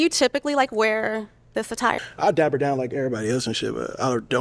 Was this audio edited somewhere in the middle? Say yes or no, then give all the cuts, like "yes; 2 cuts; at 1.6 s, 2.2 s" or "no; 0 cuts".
yes; 1 cut; at 2.0 s